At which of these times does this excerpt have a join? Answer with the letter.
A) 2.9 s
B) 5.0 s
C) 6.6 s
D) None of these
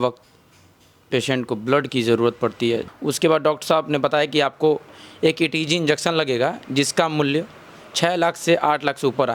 A